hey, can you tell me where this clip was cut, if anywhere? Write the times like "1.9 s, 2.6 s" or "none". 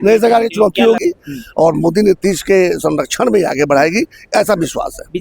1.0 s